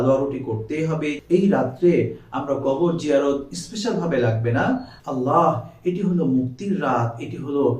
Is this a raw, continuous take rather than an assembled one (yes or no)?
no